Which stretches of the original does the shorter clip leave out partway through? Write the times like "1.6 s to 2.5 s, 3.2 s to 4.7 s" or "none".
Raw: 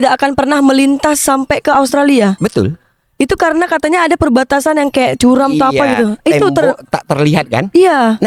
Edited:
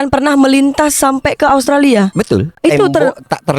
2.8 s to 6.2 s